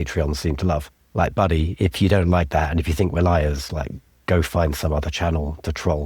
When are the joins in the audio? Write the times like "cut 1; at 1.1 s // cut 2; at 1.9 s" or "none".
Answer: cut 1; at 1.0 s